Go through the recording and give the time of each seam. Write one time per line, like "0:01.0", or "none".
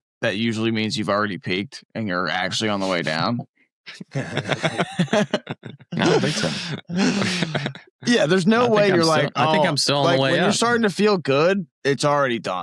0:11.7